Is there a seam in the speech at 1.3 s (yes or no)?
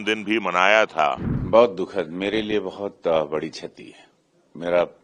yes